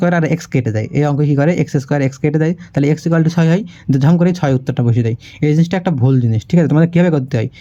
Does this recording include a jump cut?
no; 0 cuts

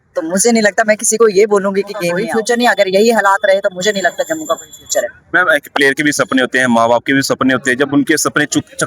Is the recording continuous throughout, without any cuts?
no; 1 cut; at 2.3 s

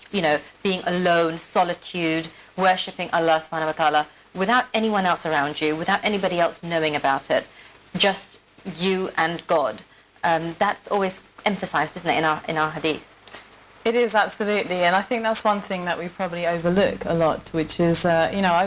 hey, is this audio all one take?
yes; 0 cuts

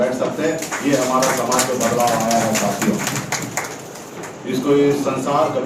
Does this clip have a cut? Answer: no; 0 cuts

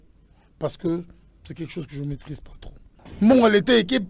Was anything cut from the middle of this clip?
yes; 1 cut; at 3.1 s

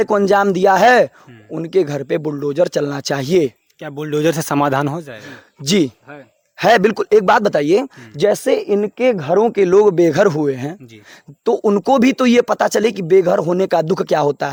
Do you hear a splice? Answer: no; 0 cuts

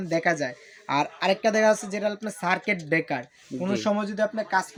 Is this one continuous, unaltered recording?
yes; 0 cuts

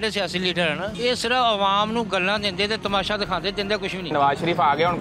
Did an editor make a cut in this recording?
yes; 2 cuts; at 0.9 s, 4.1 s

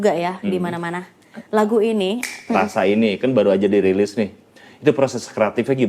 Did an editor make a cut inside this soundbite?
yes; 1 cut; at 2.4 s

